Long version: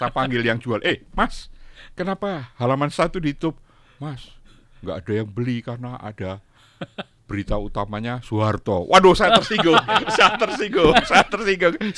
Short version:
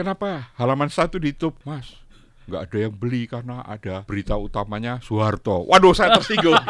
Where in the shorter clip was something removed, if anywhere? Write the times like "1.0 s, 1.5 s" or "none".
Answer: 1.6 s, 4.0 s